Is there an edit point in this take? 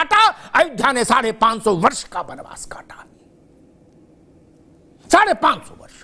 no; 0 cuts

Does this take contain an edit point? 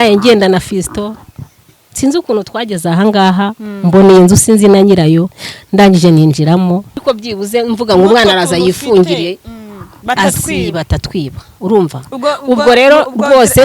yes; 1 cut; at 7.0 s

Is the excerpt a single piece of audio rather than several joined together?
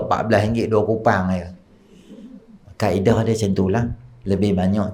yes; 0 cuts

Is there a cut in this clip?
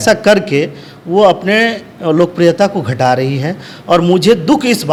no; 0 cuts

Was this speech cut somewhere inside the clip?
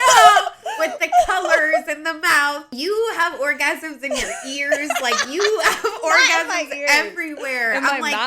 yes; 1 cut; at 2.7 s

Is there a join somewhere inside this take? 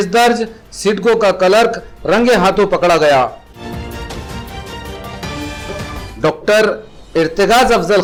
no; 0 cuts

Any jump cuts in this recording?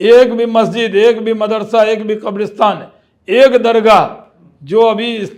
no; 0 cuts

